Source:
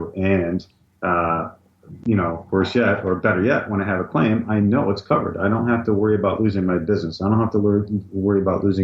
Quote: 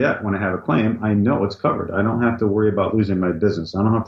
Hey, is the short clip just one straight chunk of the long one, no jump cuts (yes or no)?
yes